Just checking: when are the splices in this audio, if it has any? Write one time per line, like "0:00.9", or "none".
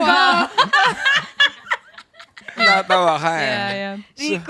0:02.6